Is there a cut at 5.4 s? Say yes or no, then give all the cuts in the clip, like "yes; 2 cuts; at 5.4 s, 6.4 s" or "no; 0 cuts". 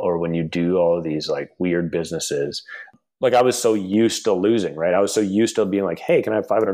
no; 1 cut; at 2.9 s